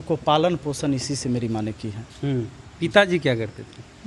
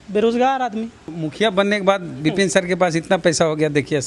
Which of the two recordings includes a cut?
second; 1 cut; at 1.0 s

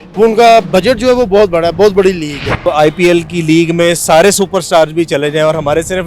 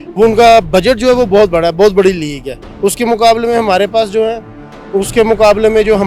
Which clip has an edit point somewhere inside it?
first; 1 cut; at 2.6 s

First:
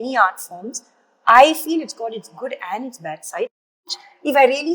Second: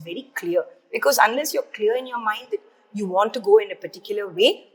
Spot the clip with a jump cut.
first; 1 cut; at 3.6 s

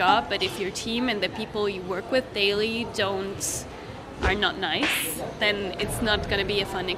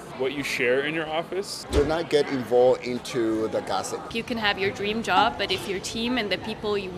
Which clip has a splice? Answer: second; 2 cuts; at 1.6 s, 4.0 s

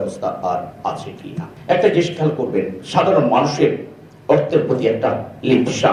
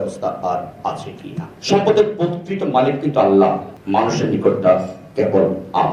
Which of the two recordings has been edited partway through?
second; 1 cut; at 1.5 s

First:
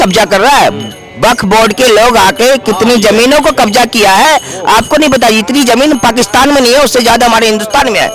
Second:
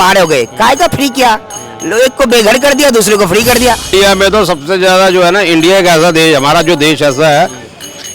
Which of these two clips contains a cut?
second; 1 cut; at 3.9 s

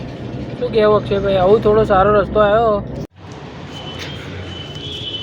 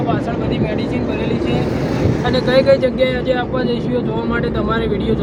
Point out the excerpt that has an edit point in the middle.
first; 1 cut; at 3.1 s

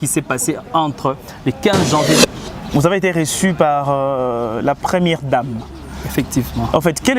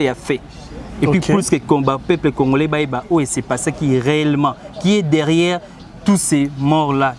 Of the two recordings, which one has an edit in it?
first; 1 cut; at 2.2 s

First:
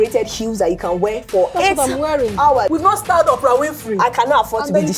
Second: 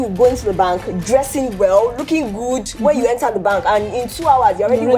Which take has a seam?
first; 2 cuts; at 1.5 s, 2.7 s

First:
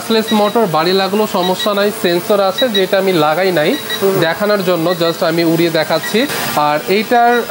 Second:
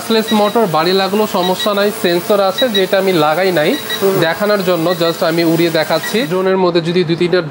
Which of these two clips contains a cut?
second; 1 cut; at 6.3 s

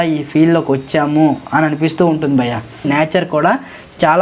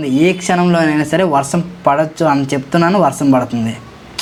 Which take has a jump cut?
first; 1 cut; at 2.9 s

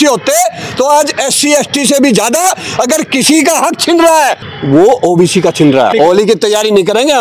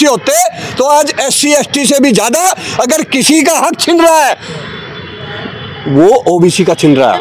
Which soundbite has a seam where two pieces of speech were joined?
first; 2 cuts; at 4.5 s, 5.9 s

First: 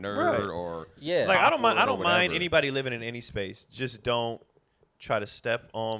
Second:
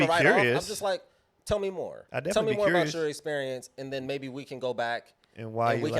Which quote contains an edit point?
second; 1 cut; at 2.0 s

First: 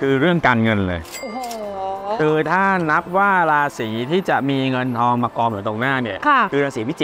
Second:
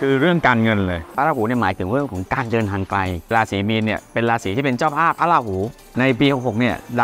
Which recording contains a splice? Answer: second; 3 cuts; at 1.1 s, 3.3 s, 5.8 s

